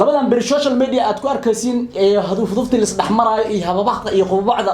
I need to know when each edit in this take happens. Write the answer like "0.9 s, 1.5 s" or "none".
none